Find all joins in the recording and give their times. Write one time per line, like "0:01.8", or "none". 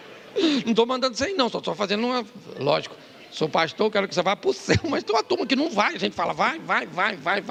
none